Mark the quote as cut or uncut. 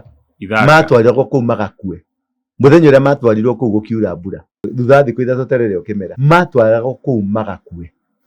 cut